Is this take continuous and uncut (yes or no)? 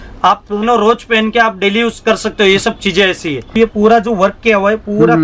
no